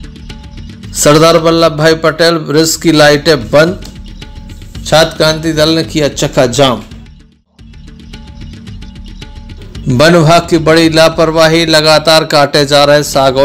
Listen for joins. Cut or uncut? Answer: cut